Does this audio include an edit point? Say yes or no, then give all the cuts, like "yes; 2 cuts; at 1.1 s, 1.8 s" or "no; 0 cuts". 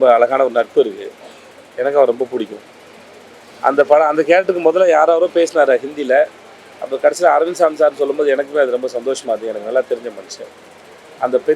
no; 0 cuts